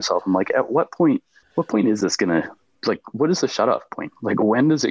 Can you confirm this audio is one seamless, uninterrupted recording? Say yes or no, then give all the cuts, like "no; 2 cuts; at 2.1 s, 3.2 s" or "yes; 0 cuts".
no; 1 cut; at 1.4 s